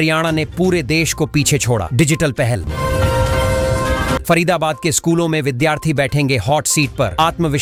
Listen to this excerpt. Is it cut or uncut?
uncut